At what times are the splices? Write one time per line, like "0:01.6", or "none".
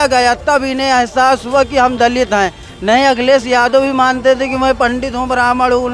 none